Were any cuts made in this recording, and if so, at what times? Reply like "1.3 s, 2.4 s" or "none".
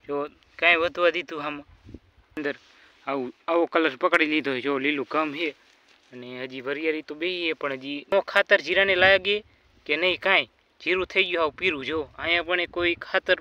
2.4 s, 8.1 s

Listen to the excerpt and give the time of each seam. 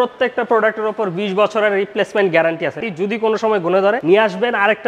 2.8 s, 4.0 s

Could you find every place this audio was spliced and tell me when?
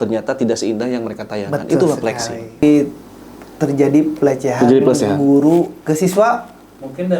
2.6 s

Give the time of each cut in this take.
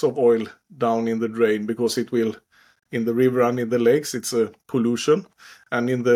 none

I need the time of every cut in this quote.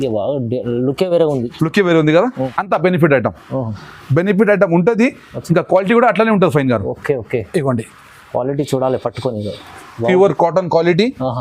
2.5 s

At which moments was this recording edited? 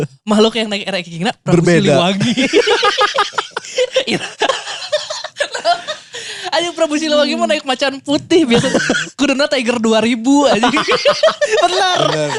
none

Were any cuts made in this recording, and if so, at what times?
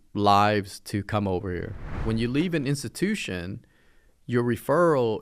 2.0 s

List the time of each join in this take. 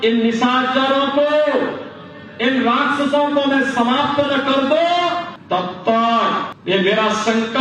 5.3 s, 6.5 s

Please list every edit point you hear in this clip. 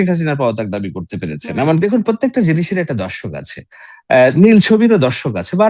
1.8 s

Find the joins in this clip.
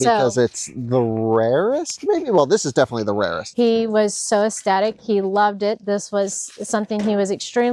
3.4 s

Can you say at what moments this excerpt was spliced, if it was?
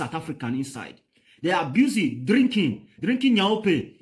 1.7 s

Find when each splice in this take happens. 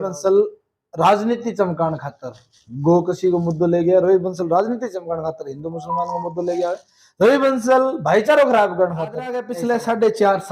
9.4 s

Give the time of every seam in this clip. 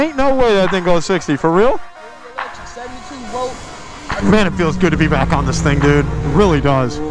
4.2 s

